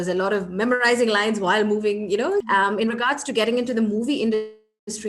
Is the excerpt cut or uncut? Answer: cut